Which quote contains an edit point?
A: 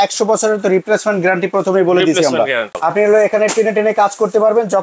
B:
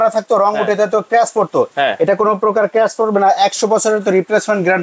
A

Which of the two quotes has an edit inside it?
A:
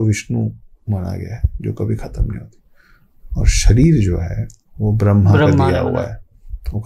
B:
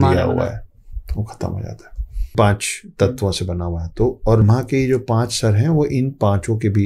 B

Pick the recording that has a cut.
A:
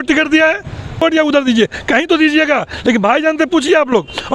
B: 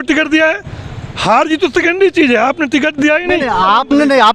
A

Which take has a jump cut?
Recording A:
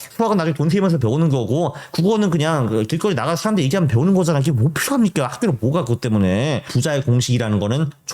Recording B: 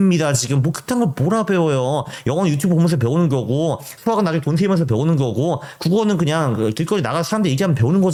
A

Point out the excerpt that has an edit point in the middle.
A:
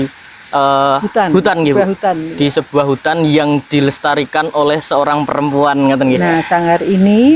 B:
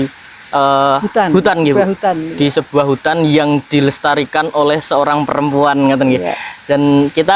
A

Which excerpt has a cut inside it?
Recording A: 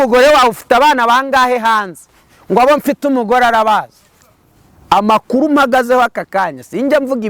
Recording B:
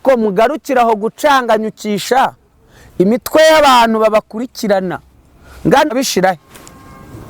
B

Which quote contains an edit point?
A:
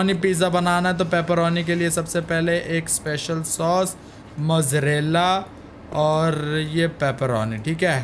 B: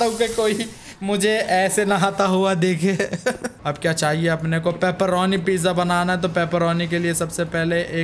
B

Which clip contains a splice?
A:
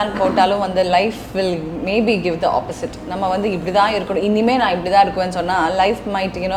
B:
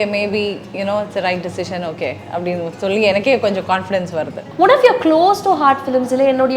B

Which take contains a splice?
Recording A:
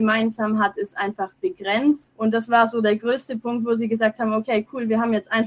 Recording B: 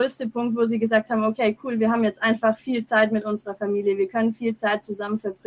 A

